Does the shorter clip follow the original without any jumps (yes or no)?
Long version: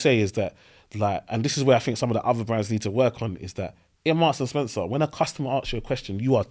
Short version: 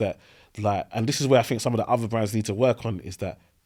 yes